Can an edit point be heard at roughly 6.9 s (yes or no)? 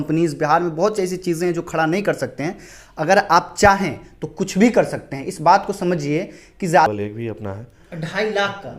yes